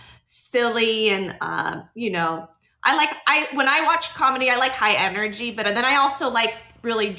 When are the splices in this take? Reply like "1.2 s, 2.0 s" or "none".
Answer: none